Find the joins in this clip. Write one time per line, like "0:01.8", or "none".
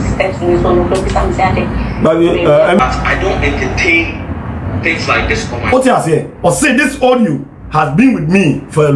0:02.8